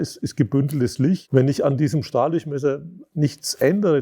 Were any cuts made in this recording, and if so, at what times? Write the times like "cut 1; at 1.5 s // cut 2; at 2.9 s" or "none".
cut 1; at 1.2 s